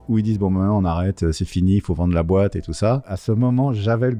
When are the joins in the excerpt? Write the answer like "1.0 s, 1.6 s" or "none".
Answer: none